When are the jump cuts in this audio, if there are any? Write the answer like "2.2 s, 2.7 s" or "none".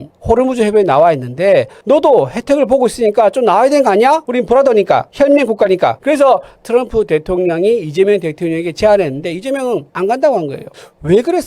4.2 s, 6.0 s